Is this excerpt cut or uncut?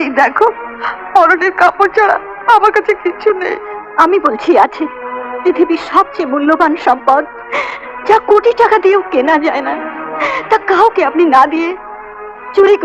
uncut